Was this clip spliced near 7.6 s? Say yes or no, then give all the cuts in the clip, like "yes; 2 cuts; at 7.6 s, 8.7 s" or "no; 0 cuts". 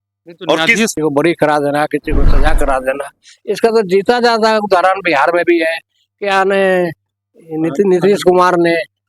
no; 1 cut; at 1.0 s